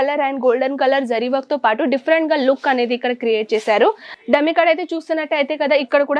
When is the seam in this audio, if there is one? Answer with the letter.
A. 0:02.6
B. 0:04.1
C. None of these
B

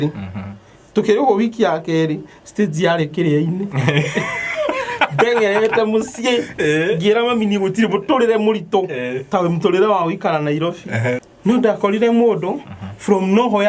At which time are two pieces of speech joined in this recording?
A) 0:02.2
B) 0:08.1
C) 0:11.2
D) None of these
C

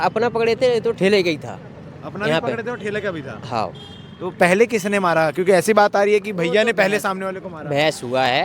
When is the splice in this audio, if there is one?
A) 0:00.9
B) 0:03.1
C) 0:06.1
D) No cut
D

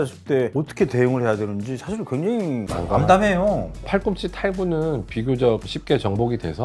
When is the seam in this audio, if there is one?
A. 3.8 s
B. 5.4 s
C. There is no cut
C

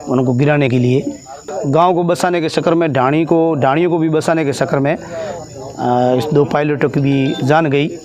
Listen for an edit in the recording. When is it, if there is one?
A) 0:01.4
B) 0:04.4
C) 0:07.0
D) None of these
A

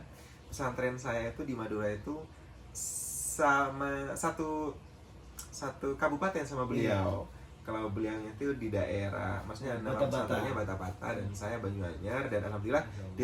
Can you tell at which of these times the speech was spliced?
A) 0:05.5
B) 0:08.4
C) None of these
C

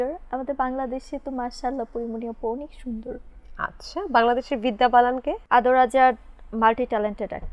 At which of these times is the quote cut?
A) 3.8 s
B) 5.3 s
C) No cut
B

